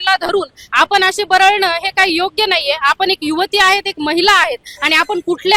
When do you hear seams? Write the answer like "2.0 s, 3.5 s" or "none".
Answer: none